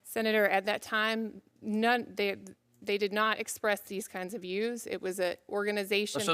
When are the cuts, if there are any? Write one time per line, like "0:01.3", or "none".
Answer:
none